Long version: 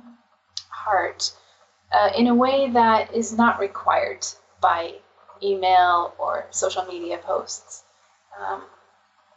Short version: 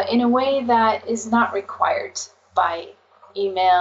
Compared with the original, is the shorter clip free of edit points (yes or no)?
yes